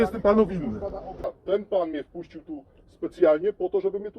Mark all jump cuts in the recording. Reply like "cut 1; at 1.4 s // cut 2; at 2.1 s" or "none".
cut 1; at 1.2 s